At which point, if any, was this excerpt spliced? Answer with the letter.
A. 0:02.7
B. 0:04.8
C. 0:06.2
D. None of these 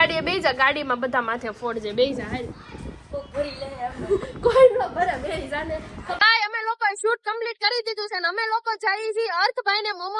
C